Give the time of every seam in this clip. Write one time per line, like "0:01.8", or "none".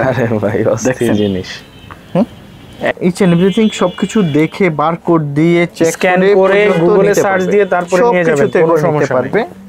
0:02.9